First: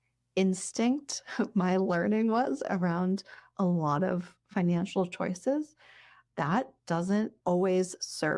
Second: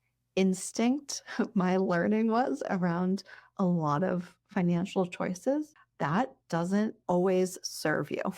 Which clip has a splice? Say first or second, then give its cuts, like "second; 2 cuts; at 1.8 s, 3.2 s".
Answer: second; 1 cut; at 5.8 s